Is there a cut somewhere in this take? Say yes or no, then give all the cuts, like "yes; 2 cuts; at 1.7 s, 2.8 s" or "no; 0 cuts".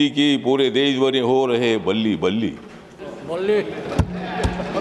no; 0 cuts